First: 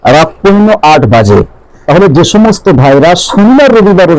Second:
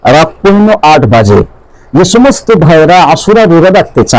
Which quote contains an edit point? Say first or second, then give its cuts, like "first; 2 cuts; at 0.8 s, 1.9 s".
first; 1 cut; at 1.8 s